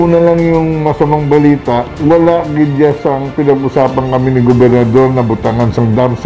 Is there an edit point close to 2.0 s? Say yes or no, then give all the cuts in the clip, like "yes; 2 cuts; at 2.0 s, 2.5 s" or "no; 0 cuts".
yes; 1 cut; at 2.0 s